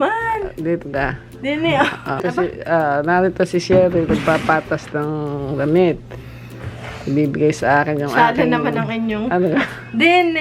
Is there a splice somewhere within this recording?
yes; 1 cut; at 2.2 s

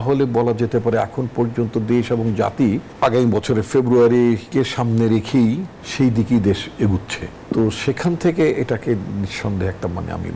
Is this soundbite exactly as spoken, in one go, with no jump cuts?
no; 3 cuts; at 2.9 s, 5.8 s, 7.3 s

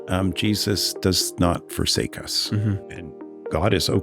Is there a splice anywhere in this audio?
yes; 1 cut; at 2.8 s

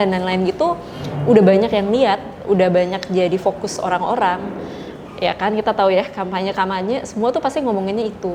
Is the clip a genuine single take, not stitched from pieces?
yes; 0 cuts

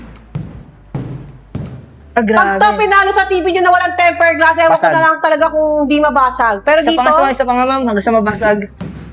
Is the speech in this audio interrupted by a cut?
no; 0 cuts

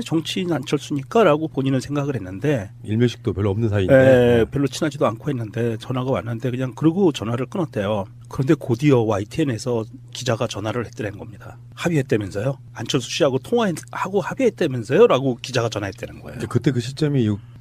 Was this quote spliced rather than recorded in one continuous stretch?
yes; 1 cut; at 3.6 s

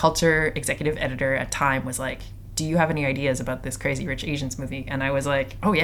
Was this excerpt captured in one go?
yes; 0 cuts

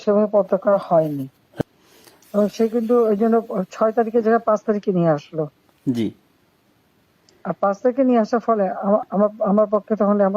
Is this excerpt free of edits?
no; 1 cut; at 1.6 s

